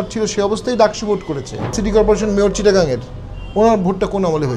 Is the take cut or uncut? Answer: cut